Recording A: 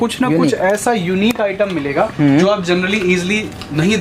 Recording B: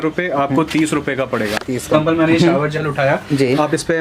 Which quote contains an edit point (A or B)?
B